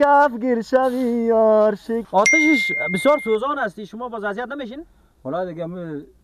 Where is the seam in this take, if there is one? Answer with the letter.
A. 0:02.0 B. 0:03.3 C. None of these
A